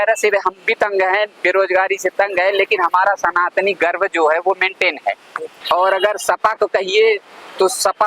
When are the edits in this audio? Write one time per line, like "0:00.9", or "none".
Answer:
0:05.2